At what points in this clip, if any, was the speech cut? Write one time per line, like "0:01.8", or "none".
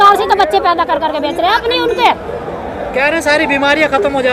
none